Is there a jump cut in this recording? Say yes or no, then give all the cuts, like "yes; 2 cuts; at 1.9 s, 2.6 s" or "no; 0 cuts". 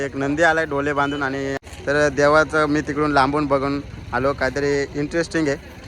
yes; 1 cut; at 1.6 s